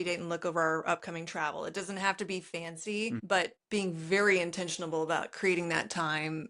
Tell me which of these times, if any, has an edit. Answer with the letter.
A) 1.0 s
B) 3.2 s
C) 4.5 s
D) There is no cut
B